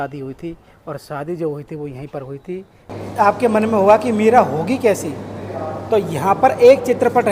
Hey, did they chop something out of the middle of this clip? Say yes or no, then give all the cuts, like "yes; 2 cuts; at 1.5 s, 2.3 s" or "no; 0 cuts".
yes; 1 cut; at 2.9 s